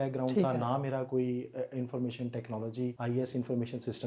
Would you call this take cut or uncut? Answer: cut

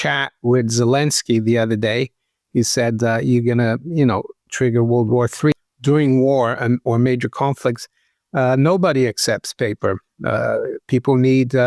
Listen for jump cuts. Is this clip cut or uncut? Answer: cut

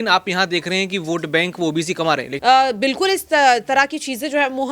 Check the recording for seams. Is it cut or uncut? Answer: cut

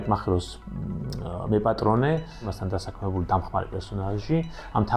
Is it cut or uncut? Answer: cut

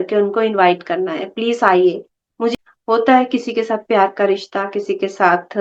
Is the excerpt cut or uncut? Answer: cut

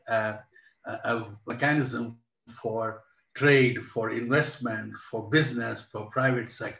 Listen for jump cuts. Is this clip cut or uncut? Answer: cut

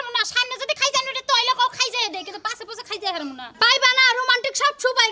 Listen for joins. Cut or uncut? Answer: cut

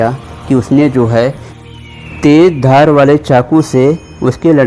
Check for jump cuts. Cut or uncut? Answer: uncut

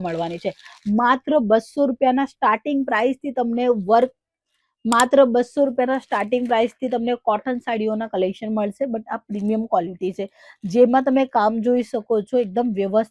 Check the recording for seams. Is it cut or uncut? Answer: uncut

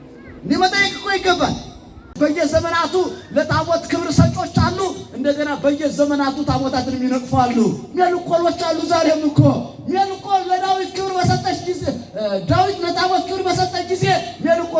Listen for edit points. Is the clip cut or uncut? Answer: cut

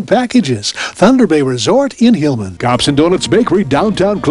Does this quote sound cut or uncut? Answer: cut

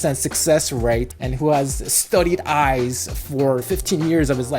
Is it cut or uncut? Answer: cut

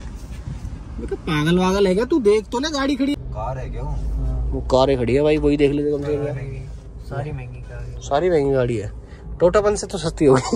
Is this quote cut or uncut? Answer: cut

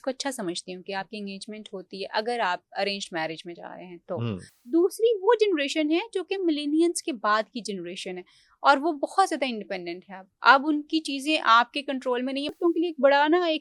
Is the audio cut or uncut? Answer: cut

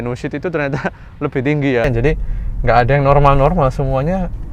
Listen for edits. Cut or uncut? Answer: cut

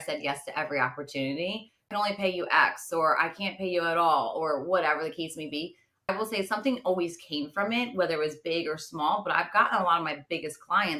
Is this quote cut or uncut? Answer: cut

